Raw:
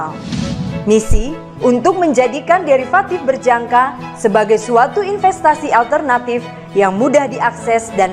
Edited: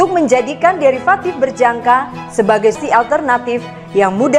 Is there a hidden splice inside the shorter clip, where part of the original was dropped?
yes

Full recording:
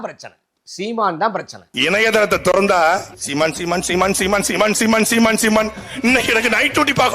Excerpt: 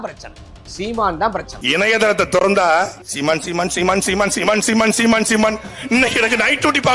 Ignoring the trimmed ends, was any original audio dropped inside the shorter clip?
yes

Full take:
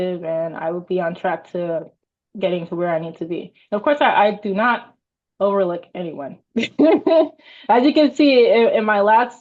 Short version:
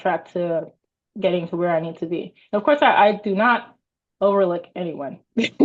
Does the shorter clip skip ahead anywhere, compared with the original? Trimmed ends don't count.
no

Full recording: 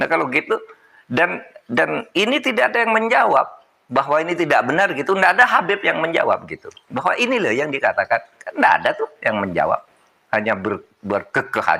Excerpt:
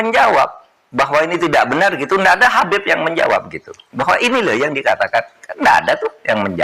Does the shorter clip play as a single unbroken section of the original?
yes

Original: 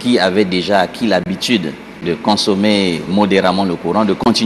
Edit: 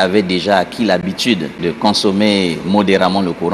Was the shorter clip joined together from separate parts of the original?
yes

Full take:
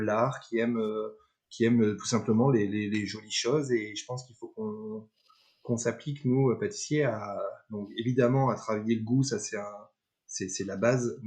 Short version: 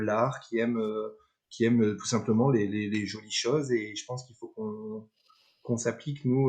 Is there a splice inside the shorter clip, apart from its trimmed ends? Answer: no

